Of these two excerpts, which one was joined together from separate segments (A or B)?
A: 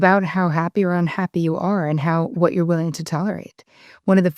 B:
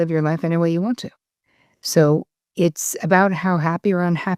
A